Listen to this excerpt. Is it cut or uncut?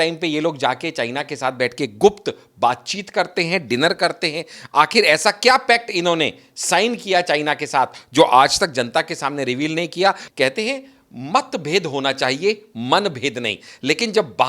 cut